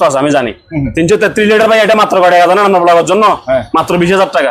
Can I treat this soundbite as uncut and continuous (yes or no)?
yes